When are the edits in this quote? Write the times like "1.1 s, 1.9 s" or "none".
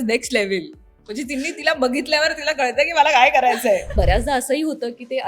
3.9 s